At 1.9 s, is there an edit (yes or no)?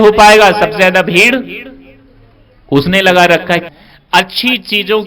no